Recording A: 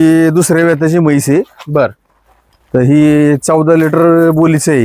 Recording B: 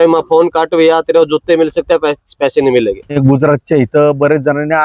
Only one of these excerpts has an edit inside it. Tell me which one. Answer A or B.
B